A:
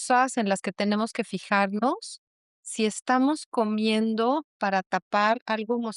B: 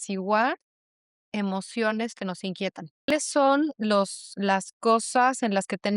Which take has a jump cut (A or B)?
B